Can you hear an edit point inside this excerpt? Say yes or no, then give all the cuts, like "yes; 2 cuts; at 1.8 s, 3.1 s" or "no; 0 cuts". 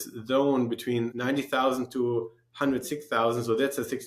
yes; 1 cut; at 1.1 s